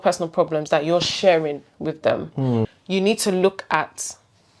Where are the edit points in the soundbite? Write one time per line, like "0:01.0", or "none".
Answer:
0:02.7